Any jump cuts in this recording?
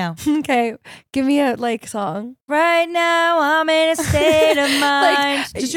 yes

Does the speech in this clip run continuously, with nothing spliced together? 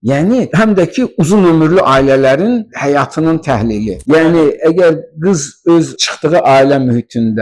no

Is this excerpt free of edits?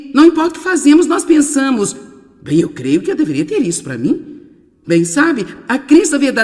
yes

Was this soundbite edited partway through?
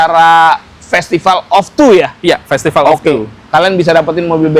no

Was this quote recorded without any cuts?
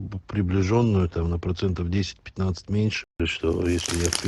yes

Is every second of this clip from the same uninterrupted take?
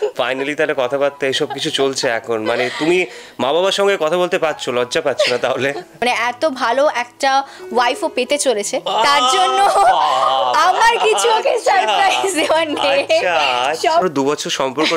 no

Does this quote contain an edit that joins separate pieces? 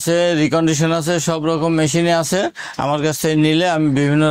no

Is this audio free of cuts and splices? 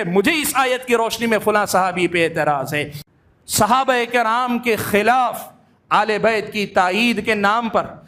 no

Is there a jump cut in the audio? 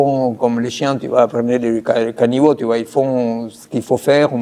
no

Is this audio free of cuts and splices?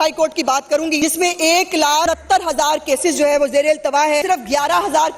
no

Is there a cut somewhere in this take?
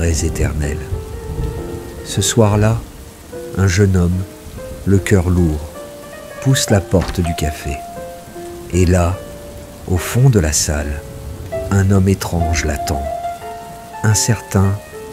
no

